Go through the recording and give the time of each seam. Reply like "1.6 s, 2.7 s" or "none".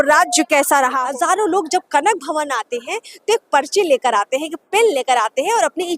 1.0 s